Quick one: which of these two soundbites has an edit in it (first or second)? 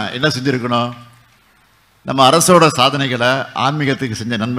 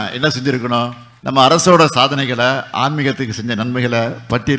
second